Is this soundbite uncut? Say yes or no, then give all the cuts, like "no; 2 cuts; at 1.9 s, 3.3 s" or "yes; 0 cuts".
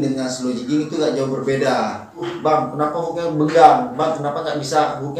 no; 1 cut; at 2.3 s